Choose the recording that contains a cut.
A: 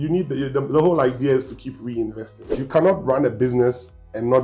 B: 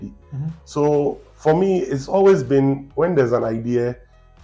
A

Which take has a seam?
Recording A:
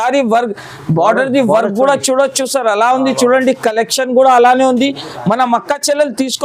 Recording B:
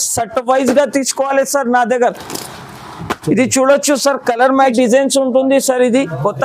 B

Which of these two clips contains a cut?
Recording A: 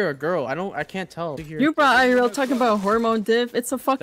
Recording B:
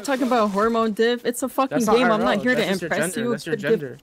A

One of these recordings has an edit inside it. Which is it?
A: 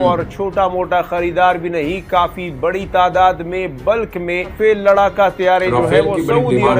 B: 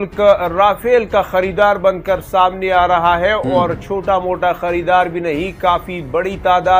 A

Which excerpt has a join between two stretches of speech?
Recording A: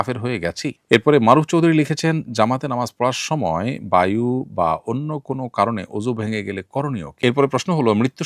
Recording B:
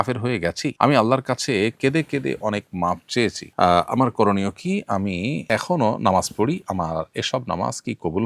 A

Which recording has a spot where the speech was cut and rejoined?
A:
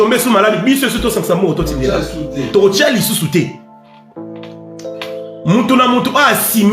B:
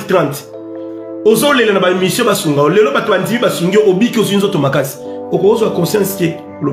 A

